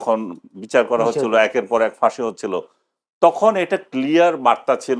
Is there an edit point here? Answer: no; 0 cuts

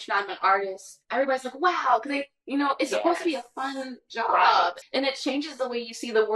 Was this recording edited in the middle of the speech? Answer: yes; 2 cuts; at 1.0 s, 4.8 s

